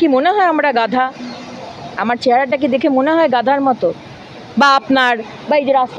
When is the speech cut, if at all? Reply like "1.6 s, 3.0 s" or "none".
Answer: none